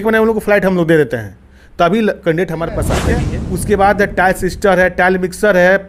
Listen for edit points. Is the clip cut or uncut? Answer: cut